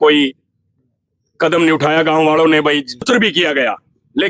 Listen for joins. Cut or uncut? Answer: cut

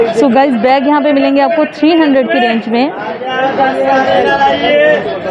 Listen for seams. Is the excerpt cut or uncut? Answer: uncut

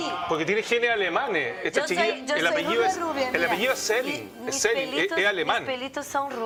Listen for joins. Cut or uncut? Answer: uncut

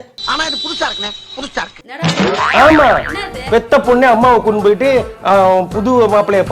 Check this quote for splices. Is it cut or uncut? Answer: uncut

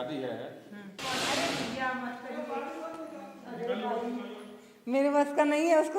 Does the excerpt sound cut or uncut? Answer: cut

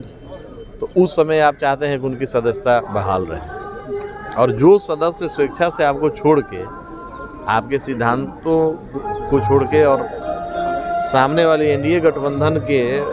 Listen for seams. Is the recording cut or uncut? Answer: uncut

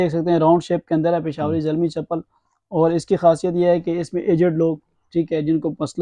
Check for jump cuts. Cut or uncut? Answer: uncut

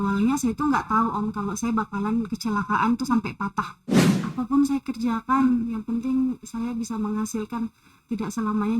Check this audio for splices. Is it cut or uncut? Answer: cut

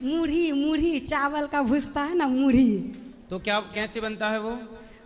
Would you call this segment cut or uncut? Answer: uncut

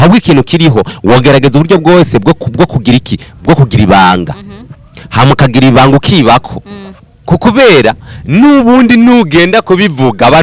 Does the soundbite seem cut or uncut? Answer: uncut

